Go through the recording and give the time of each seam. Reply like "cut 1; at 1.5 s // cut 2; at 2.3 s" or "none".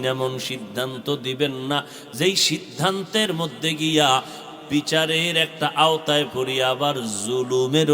none